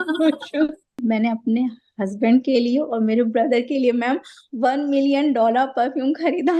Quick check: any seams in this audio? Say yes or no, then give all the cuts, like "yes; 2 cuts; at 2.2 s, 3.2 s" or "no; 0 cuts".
yes; 1 cut; at 1.0 s